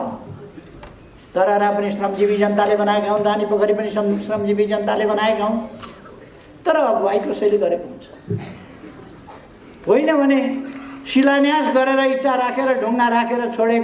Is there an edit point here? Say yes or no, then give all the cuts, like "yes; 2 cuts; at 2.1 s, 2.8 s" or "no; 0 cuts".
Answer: no; 0 cuts